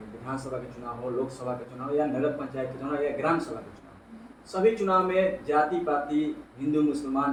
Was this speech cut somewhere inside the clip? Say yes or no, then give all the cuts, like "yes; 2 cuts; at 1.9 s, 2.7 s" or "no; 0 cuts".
no; 0 cuts